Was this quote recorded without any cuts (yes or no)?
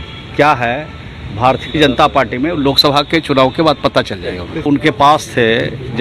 no